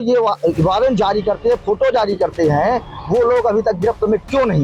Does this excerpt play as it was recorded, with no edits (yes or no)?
yes